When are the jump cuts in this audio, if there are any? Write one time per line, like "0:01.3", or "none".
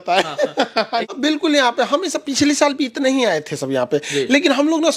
0:01.1